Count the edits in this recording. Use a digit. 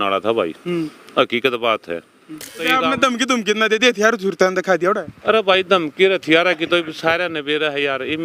1